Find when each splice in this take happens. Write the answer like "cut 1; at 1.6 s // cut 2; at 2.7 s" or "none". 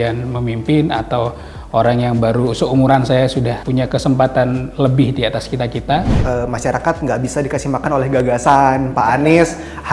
cut 1; at 3.6 s // cut 2; at 6.2 s